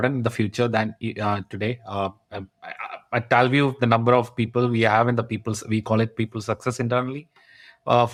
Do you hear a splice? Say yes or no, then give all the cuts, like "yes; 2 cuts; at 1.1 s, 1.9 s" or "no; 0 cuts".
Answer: no; 0 cuts